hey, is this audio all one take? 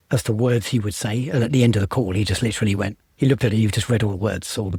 yes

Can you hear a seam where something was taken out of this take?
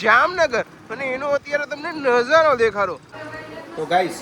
yes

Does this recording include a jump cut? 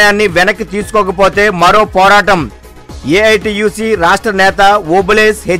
no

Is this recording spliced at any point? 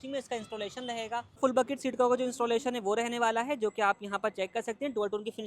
yes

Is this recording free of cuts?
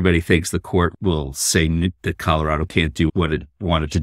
no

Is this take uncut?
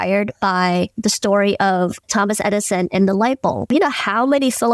no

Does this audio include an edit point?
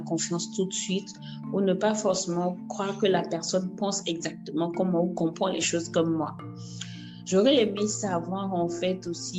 no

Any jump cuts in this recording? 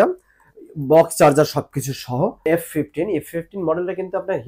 yes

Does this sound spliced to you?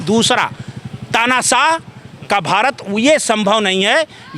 no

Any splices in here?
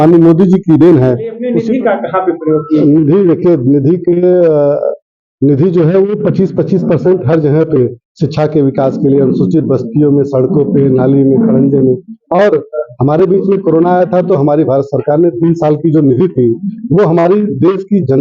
yes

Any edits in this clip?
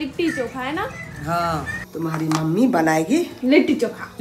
yes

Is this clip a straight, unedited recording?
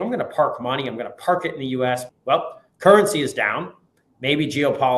no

